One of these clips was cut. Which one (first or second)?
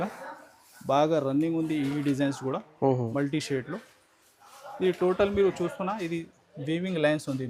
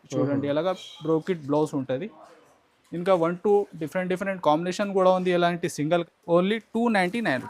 second